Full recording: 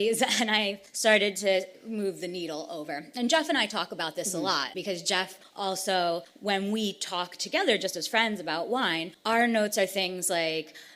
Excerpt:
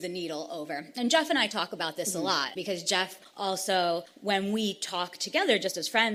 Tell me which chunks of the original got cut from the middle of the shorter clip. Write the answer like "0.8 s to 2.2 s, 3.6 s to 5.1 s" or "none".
none